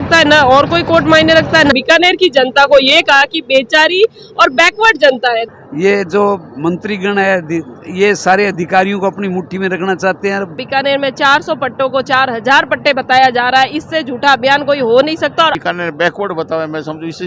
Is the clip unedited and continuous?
no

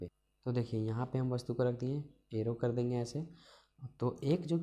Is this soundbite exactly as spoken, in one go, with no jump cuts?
yes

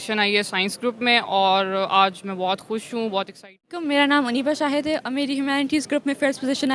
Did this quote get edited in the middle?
yes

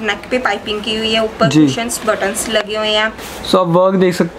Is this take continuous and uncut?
no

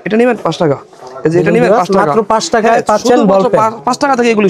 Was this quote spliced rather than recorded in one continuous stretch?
no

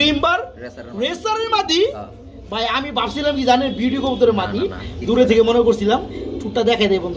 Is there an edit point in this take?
no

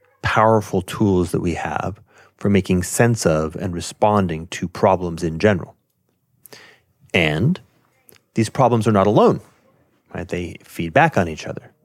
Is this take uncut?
yes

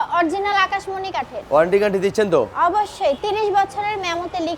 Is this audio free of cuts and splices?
yes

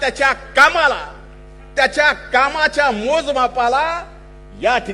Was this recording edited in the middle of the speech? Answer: no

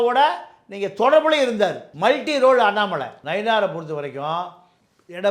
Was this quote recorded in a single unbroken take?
no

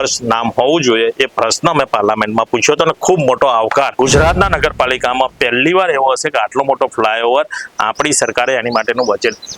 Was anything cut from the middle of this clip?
yes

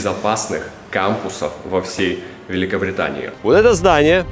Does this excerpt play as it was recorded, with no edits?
no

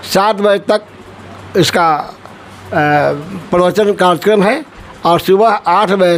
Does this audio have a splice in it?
no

